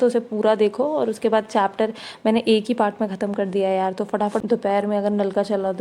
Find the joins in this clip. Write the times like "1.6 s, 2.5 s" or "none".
4.4 s

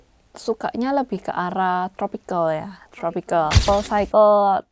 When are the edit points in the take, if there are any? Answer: 3.7 s

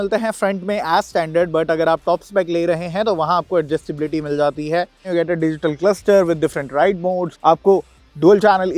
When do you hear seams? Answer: 5.1 s

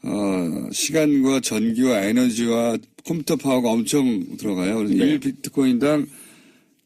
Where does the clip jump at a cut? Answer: 3.2 s

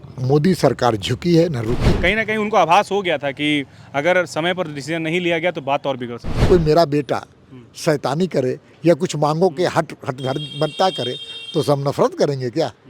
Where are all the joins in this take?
1.8 s, 6.5 s

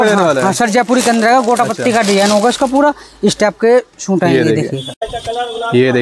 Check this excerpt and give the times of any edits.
5.1 s

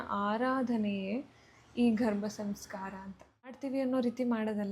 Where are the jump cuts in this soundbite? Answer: 3.6 s

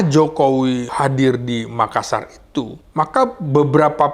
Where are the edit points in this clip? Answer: 0.9 s, 2.8 s

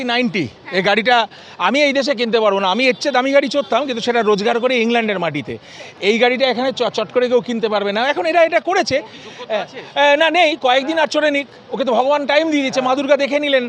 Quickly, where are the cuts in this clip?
none

